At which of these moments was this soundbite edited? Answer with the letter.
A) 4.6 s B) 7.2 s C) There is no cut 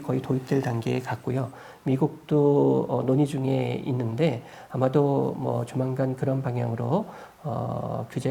C